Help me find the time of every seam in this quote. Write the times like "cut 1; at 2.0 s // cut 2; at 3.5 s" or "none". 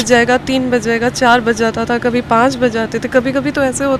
none